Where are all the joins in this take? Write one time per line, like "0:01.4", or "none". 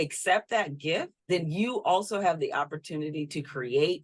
0:01.1

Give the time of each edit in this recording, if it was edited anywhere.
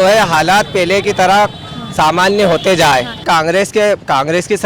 0:03.2

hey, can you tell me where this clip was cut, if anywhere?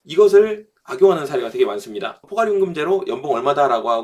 0:02.2

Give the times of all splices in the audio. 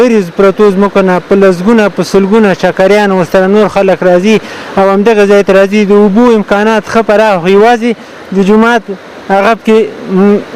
none

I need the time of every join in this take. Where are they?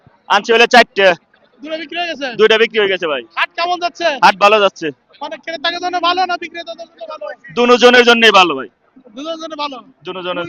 none

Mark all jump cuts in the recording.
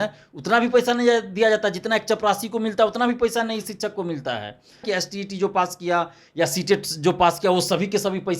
0:04.8

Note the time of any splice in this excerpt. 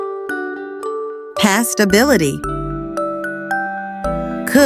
0:01.4

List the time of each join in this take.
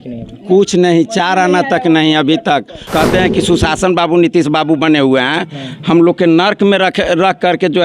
0:02.9

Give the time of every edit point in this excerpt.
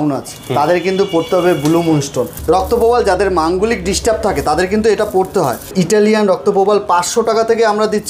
0:02.4
0:05.7

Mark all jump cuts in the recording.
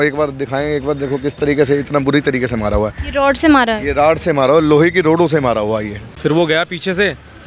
0:06.0

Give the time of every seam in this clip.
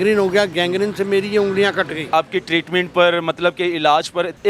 0:02.1

